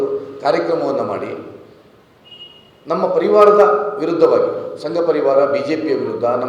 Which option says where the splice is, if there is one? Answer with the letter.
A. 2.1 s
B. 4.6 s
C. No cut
A